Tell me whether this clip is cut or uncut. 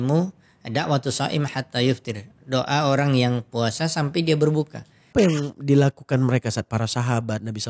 cut